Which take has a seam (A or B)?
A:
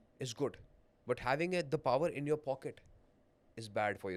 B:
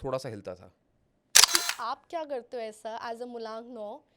B